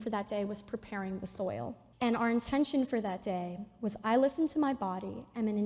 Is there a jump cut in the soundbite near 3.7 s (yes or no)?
no